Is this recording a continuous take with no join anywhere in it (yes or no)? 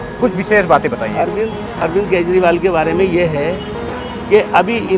yes